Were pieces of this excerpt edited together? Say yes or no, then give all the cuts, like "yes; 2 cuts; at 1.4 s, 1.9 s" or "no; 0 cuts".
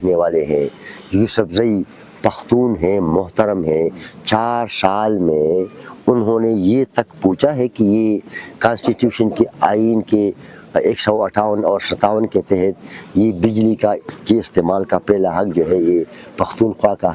no; 0 cuts